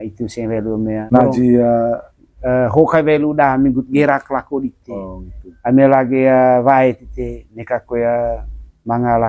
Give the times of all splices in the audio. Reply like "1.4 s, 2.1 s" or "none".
1.0 s